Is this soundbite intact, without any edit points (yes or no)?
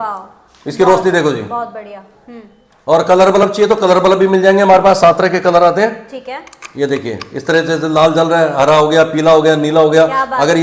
yes